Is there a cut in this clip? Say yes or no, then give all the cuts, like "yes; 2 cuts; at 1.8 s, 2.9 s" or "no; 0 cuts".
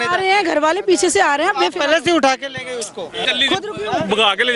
yes; 1 cut; at 3.2 s